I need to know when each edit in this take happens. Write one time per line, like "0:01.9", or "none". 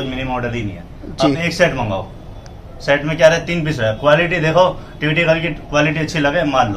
none